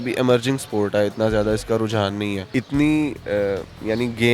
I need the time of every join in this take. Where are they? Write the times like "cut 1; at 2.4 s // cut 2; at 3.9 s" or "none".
cut 1; at 2.4 s